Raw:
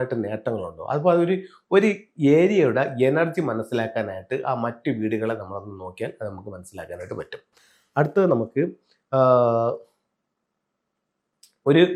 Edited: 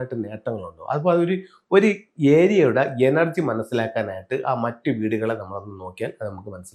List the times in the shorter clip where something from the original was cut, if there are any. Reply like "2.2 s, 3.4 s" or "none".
none